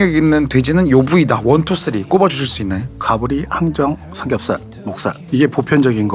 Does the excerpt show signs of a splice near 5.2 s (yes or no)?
yes